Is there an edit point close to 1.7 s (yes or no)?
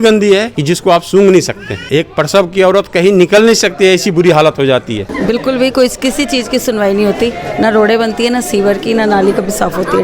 yes